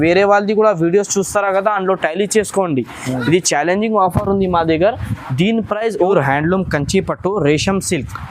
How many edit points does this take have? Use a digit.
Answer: 1